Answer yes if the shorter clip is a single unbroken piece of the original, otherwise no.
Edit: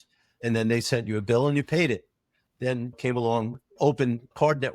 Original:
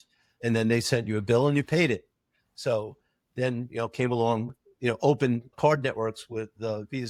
no